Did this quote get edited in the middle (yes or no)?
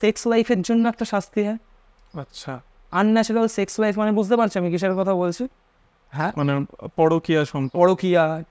no